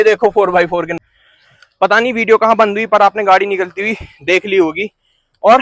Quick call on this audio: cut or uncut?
uncut